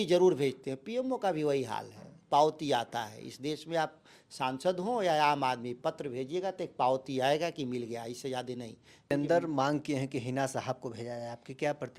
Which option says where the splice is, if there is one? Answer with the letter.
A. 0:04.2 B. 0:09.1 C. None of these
B